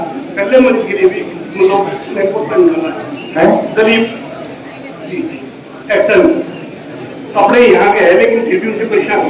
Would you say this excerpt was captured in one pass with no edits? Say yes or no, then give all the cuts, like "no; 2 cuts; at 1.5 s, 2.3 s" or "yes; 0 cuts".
yes; 0 cuts